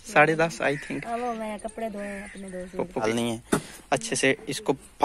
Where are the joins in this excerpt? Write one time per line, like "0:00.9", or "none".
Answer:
0:03.0